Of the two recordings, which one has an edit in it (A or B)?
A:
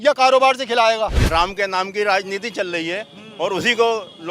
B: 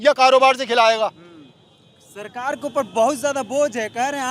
A